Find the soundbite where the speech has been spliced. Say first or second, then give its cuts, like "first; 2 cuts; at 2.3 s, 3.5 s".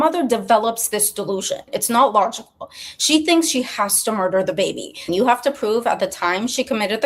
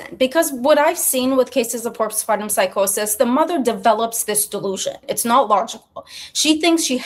first; 1 cut; at 5.0 s